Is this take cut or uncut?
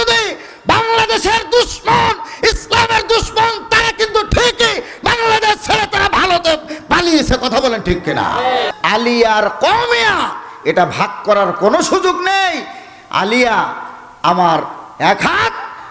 cut